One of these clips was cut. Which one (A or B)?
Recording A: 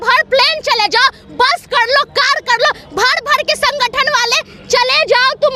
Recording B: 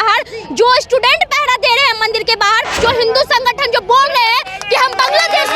B